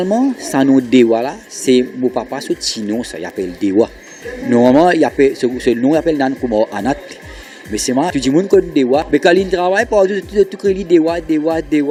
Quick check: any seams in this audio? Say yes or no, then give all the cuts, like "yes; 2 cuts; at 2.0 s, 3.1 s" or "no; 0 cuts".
no; 0 cuts